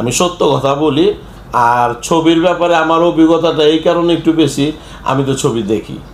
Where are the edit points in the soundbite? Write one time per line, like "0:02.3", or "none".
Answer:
none